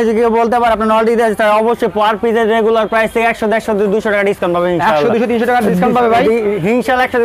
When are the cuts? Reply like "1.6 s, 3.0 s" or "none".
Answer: none